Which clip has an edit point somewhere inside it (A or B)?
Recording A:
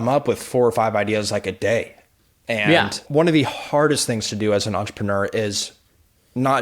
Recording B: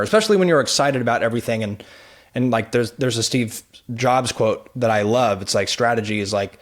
A